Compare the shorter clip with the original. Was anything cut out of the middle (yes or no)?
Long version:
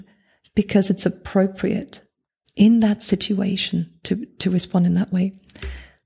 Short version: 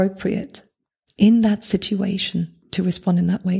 yes